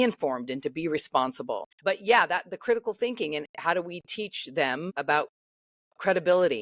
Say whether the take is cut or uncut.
cut